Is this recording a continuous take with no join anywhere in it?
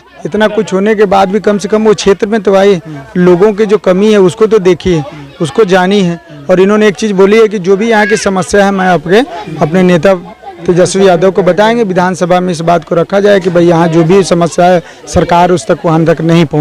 yes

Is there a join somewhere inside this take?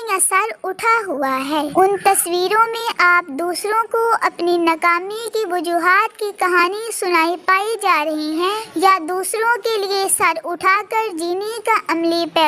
yes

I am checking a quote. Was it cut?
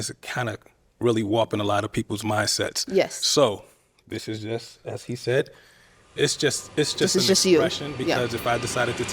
no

